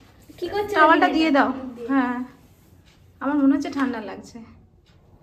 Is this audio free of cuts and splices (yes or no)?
yes